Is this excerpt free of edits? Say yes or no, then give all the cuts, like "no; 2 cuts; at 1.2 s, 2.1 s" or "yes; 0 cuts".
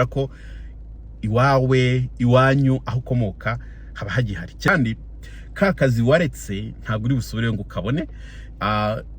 no; 1 cut; at 4.7 s